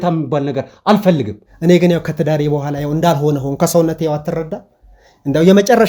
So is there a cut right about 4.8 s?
no; 1 cut; at 1.4 s

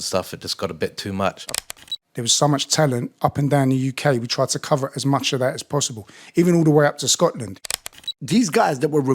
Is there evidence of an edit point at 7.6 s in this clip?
yes; 2 cuts; at 1.6 s, 7.6 s

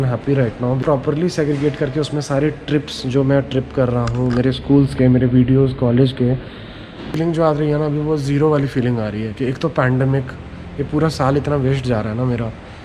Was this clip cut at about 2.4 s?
no; 2 cuts; at 0.8 s, 7.2 s

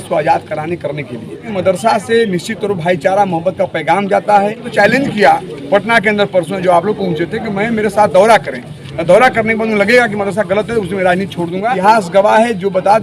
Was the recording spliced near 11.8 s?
yes; 3 cuts; at 1.5 s, 4.6 s, 11.8 s

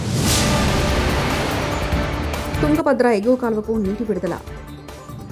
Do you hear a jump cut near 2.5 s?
yes; 1 cut; at 2.5 s

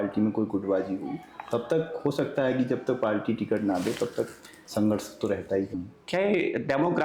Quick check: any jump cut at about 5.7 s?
yes; 1 cut; at 5.7 s

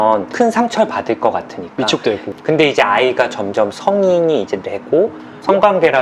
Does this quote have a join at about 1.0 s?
no; 1 cut; at 2.3 s

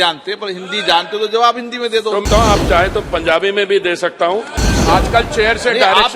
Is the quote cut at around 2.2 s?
yes; 2 cuts; at 2.2 s, 4.5 s

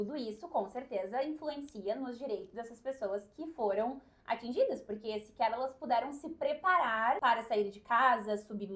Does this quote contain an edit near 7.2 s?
yes; 1 cut; at 7.2 s

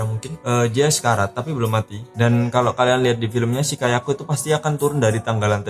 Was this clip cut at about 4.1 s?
no; 1 cut; at 2.2 s

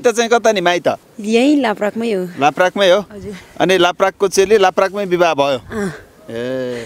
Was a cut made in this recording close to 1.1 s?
yes; 1 cut; at 1.1 s

